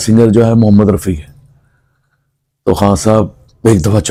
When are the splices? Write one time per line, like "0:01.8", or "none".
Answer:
none